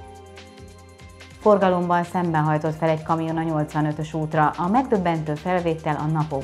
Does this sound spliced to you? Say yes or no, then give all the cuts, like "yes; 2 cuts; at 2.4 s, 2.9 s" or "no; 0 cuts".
yes; 1 cut; at 1.3 s